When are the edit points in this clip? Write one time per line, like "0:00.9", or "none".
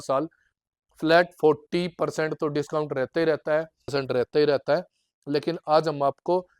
0:03.9